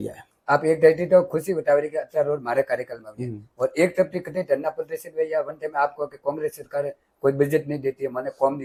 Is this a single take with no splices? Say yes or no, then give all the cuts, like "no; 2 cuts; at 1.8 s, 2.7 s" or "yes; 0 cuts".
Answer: yes; 0 cuts